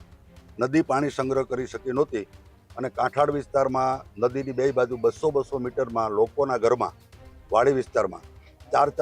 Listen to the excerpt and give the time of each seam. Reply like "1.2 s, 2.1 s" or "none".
none